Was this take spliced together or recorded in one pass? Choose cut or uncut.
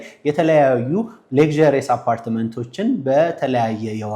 uncut